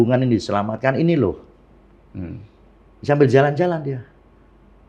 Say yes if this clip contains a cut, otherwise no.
no